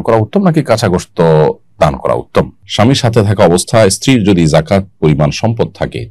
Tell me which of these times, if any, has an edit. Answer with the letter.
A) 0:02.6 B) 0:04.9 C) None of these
A